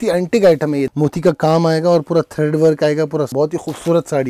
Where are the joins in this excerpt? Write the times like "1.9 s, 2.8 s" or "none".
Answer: 0.9 s, 3.3 s